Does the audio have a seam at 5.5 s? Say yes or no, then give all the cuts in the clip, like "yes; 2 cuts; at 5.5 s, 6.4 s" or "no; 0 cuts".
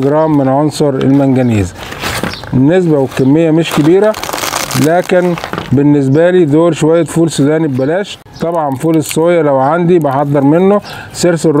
no; 0 cuts